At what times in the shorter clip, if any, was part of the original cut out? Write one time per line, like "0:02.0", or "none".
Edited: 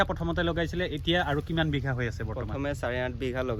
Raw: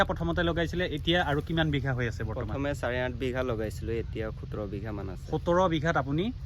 none